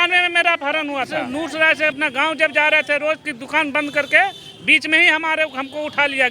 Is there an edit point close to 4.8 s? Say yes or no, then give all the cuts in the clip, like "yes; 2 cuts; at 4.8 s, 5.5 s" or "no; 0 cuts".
no; 1 cut; at 1.2 s